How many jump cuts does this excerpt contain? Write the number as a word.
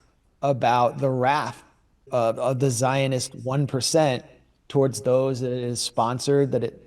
one